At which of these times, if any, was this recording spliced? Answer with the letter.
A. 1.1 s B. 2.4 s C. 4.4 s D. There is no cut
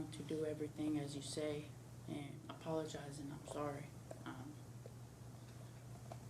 B